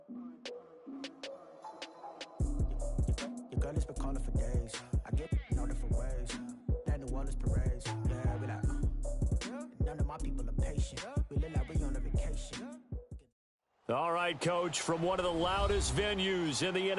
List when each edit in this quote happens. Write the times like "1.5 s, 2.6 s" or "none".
13.1 s